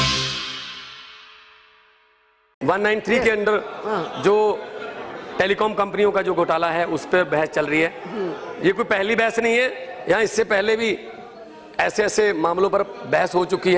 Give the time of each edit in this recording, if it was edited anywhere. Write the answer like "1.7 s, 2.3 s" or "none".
2.3 s